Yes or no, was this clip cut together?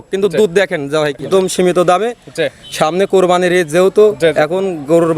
yes